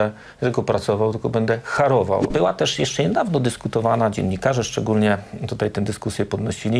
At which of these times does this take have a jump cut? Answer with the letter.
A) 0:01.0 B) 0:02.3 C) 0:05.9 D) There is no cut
B